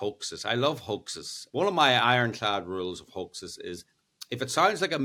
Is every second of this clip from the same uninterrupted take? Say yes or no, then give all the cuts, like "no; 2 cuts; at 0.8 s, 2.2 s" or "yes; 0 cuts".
no; 1 cut; at 1.3 s